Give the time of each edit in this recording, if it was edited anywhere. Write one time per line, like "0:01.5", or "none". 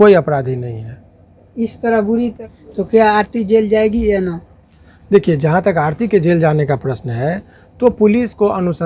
none